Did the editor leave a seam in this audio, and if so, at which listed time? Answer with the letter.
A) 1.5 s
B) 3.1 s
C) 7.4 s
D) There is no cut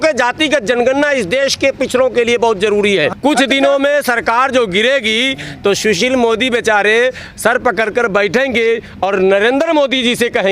B